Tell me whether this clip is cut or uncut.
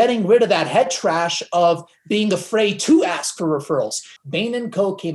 cut